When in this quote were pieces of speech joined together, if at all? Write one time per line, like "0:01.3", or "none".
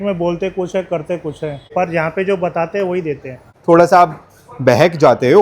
0:01.7
0:03.5